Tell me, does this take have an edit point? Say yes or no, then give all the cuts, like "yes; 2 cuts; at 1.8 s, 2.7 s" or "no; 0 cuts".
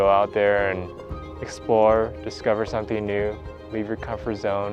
no; 0 cuts